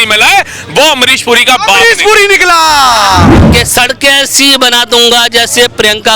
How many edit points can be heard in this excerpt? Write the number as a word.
one